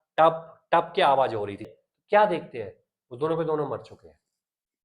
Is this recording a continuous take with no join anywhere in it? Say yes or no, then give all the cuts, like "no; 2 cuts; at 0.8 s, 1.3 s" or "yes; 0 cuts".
no; 1 cut; at 1.7 s